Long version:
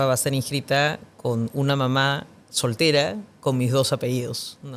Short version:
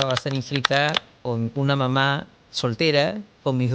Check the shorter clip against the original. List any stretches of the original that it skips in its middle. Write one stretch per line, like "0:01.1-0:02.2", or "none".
none